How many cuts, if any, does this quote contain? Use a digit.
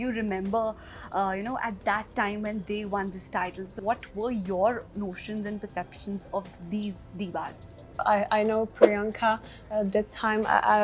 1